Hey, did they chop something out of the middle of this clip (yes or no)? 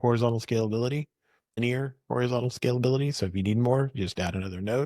yes